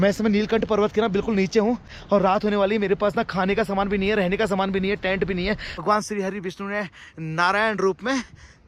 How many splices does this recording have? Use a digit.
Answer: 2